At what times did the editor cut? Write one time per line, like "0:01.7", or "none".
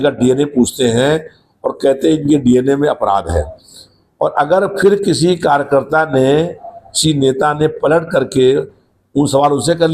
none

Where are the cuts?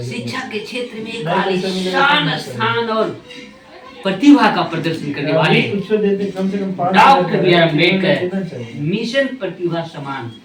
none

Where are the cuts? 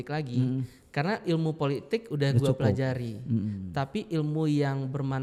none

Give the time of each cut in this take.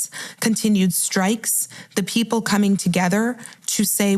none

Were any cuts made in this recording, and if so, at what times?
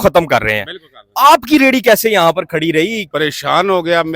0:03.0

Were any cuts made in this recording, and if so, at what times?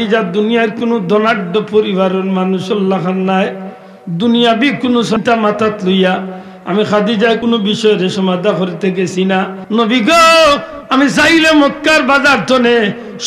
0:07.4
0:09.6

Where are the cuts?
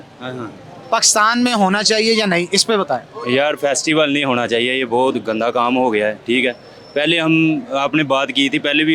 none

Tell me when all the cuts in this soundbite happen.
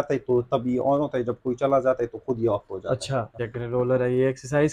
0:03.4

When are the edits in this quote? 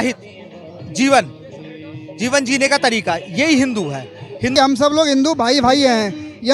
0:04.5

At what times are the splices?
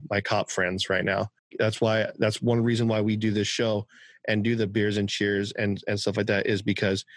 0:01.5

